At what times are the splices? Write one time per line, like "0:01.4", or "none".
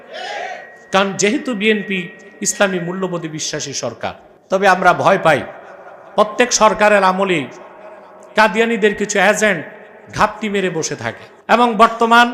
0:04.3
0:11.3